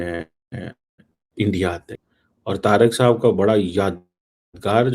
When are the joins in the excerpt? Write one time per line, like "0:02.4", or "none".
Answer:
0:01.9